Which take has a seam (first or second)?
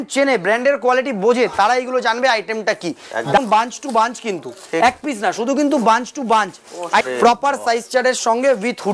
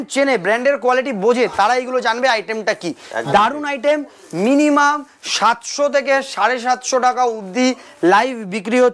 first